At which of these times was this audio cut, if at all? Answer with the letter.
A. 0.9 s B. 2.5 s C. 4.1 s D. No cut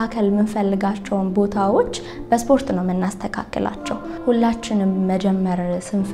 C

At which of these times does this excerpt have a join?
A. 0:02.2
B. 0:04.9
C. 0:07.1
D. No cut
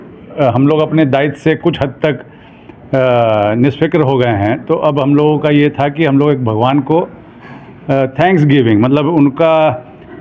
D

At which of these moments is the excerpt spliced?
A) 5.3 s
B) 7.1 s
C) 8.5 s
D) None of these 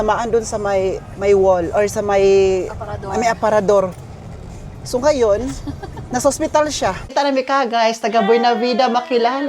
B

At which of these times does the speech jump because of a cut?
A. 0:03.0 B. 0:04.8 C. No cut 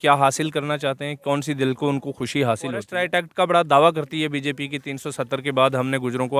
A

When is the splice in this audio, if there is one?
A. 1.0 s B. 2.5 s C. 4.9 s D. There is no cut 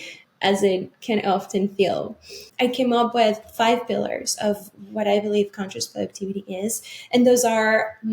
B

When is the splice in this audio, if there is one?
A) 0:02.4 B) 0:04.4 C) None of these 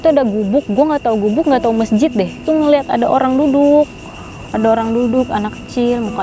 A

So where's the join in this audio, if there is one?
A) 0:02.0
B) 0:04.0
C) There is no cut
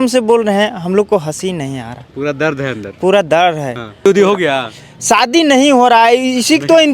B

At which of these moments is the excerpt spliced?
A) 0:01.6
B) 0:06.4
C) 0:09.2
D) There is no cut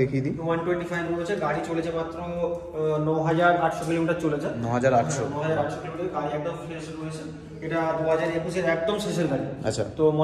D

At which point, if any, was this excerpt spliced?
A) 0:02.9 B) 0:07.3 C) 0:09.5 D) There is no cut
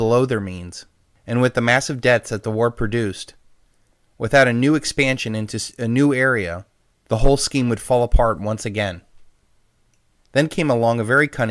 C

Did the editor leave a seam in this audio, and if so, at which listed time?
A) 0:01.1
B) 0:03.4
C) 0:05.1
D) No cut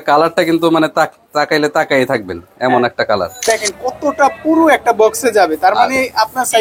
B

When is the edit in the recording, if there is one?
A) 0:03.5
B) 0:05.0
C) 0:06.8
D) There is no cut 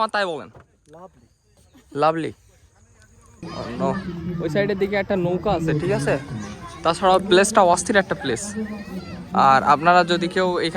A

